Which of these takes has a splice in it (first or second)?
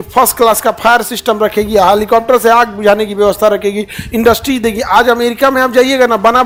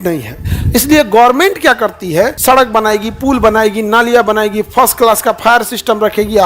second